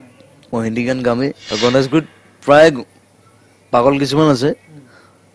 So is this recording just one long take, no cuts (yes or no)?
no